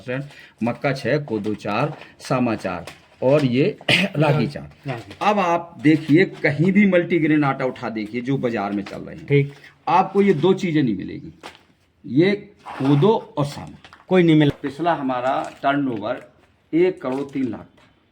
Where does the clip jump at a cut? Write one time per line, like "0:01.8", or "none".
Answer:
0:14.5